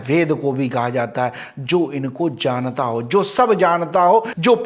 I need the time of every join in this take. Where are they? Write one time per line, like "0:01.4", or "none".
none